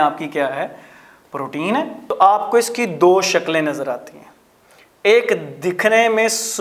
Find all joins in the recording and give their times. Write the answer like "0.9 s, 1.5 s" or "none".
2.0 s